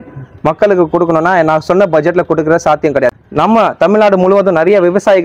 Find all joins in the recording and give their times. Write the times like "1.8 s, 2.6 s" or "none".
3.1 s